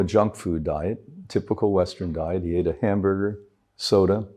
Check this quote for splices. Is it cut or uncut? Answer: uncut